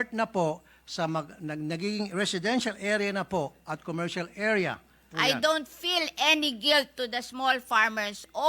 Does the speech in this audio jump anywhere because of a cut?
yes; 1 cut; at 5.0 s

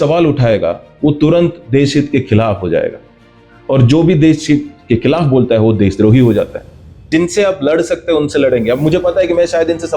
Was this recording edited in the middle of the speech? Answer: yes; 1 cut; at 7.1 s

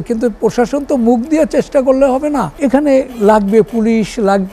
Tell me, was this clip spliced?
yes; 1 cut; at 2.5 s

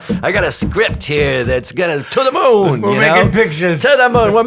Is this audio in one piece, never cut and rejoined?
yes; 0 cuts

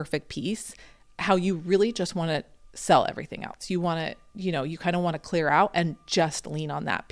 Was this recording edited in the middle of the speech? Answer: no; 0 cuts

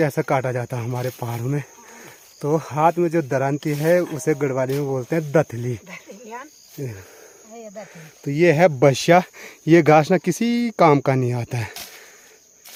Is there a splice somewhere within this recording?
no; 0 cuts

